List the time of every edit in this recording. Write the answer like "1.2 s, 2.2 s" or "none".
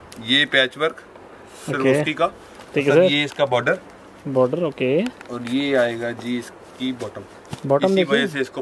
none

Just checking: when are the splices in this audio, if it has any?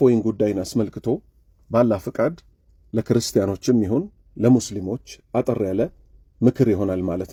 none

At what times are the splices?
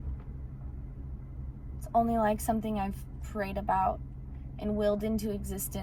none

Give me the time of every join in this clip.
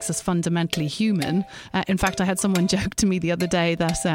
1.5 s

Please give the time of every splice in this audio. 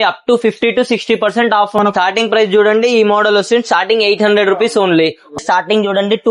1.8 s, 5.4 s

